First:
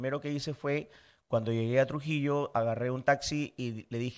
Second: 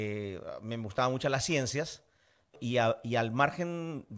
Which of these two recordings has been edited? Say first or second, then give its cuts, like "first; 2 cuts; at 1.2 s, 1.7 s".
second; 1 cut; at 2.6 s